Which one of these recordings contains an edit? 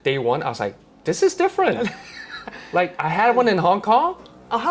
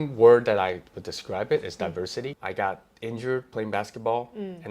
second; 1 cut; at 2.3 s

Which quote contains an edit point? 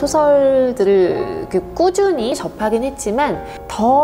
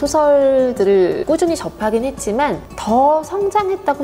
second; 2 cuts; at 1.4 s, 2.7 s

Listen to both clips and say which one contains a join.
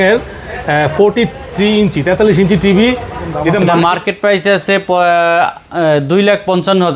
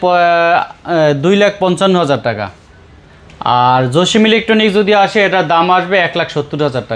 first; 1 cut; at 3.6 s

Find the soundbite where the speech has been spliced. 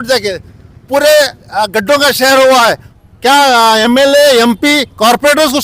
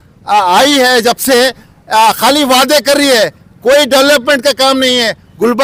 first; 1 cut; at 2.9 s

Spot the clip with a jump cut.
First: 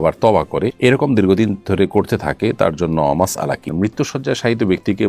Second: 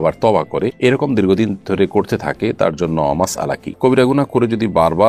first; 1 cut; at 3.7 s

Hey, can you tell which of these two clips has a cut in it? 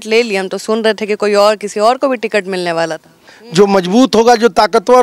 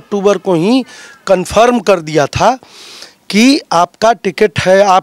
first; 1 cut; at 3.3 s

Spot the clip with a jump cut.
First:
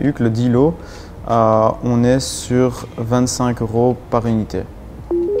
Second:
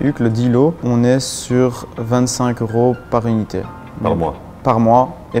second; 2 cuts; at 0.8 s, 4.0 s

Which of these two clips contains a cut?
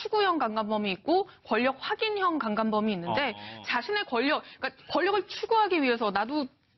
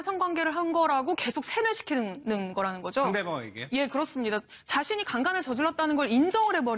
second; 1 cut; at 2.5 s

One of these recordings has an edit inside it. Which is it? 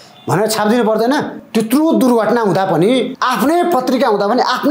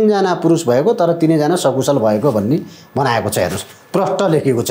first; 2 cuts; at 1.4 s, 3.1 s

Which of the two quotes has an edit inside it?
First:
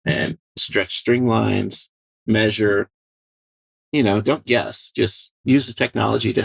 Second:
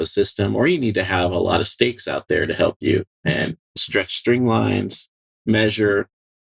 first; 1 cut; at 5.4 s

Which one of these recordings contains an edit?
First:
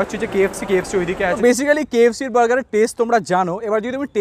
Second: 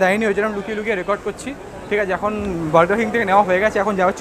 first; 1 cut; at 1.4 s

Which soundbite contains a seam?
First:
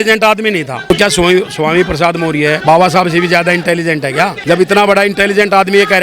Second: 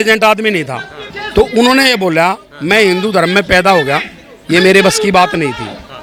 first; 3 cuts; at 0.9 s, 2.6 s, 4.4 s

